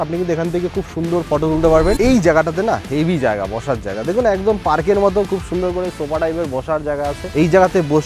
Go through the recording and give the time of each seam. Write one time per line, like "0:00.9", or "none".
0:02.0
0:07.3